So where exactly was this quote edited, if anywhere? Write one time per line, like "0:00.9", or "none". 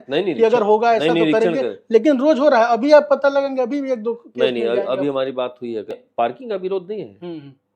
0:06.0